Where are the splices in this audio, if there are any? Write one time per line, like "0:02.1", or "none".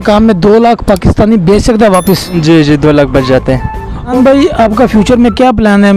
0:04.1